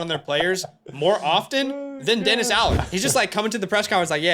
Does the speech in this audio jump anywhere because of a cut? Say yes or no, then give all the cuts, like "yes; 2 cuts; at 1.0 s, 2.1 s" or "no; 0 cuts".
yes; 1 cut; at 2.8 s